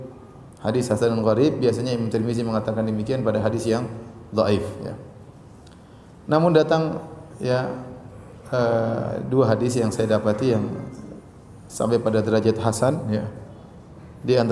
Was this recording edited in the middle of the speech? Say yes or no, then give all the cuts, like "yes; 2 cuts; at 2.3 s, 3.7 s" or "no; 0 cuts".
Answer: no; 0 cuts